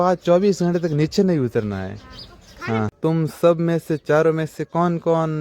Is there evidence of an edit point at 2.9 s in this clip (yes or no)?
yes